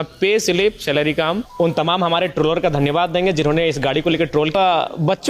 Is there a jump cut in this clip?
yes; 2 cuts; at 1.5 s, 4.5 s

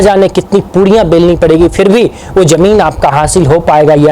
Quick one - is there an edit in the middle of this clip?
no; 0 cuts

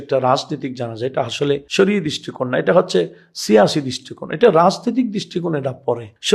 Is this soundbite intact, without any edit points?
yes; 0 cuts

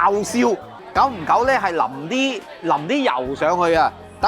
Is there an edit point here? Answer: no; 0 cuts

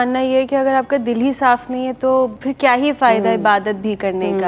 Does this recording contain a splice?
yes; 1 cut; at 2.4 s

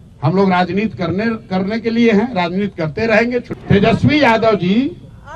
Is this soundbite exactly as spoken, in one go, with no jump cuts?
no; 1 cut; at 3.5 s

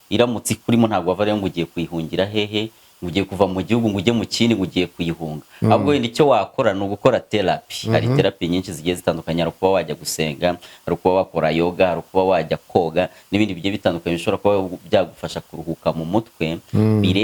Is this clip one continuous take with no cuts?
yes; 0 cuts

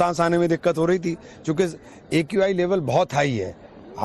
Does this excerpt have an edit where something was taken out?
no; 0 cuts

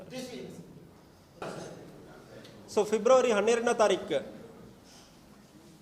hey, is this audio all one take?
no; 1 cut; at 1.4 s

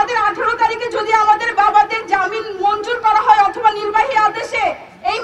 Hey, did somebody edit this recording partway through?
no; 0 cuts

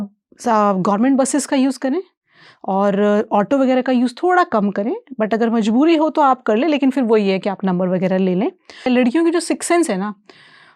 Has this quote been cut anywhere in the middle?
yes; 1 cut; at 8.9 s

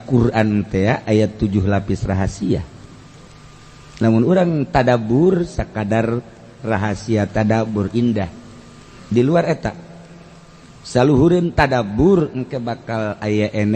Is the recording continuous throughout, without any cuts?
no; 1 cut; at 3.2 s

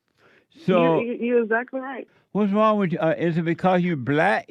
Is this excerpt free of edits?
no; 1 cut; at 2.0 s

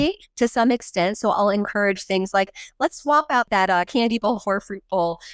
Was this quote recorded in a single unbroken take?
no; 1 cut; at 3.5 s

